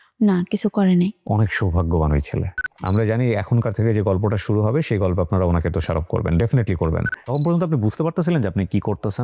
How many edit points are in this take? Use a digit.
2